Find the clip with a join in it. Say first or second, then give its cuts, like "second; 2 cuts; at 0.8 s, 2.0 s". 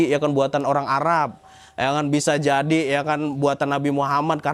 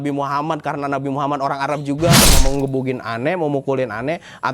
second; 1 cut; at 2.4 s